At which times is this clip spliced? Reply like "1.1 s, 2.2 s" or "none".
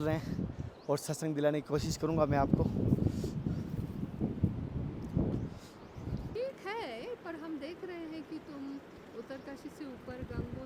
6.3 s

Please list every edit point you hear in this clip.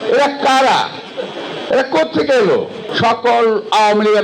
2.8 s

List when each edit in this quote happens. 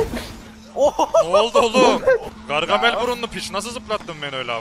2.4 s

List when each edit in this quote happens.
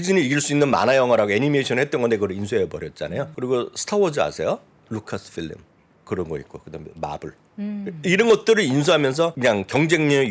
3.3 s, 9.3 s

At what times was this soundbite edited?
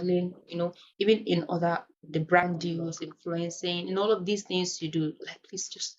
none

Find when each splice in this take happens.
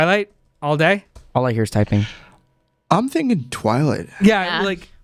none

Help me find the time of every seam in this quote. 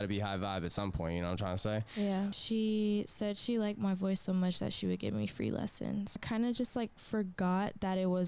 2.4 s, 6.2 s

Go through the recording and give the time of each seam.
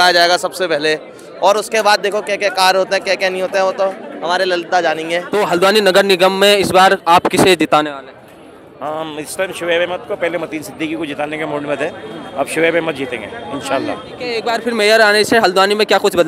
5.3 s, 14.4 s

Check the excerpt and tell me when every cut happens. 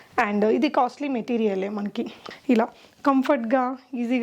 2.2 s

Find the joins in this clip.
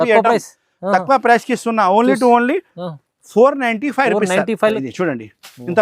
4.8 s

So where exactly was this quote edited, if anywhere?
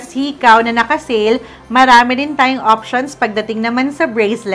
none

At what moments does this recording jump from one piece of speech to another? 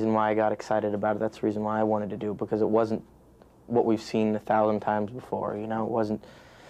none

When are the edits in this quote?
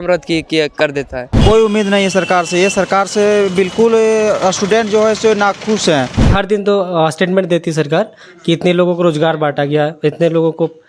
1.3 s, 6.3 s

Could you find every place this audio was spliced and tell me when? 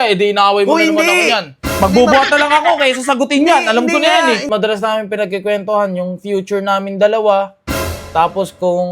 4.5 s

